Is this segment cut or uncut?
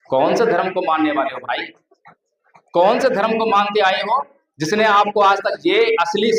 uncut